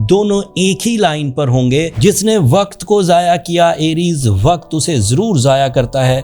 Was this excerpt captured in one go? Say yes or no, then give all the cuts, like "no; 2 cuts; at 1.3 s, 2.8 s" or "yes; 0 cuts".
no; 1 cut; at 1.9 s